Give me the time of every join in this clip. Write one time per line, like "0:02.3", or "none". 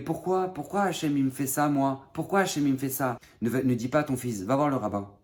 0:03.3